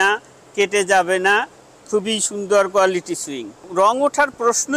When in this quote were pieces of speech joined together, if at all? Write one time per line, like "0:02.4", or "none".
0:03.7